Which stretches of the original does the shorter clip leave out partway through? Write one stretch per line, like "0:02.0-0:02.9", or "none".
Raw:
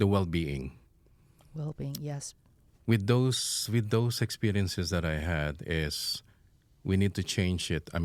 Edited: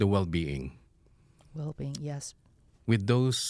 none